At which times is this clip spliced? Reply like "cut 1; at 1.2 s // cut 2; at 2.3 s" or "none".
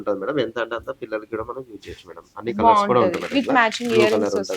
none